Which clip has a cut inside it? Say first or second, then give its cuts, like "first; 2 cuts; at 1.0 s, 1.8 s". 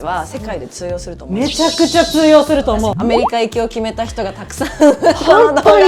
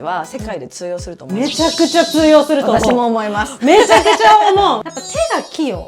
first; 1 cut; at 2.8 s